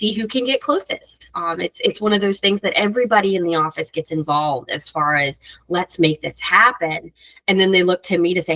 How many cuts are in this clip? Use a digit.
0